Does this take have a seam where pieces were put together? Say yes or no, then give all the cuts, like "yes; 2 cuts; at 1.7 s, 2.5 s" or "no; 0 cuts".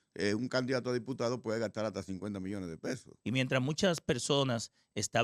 yes; 1 cut; at 3.1 s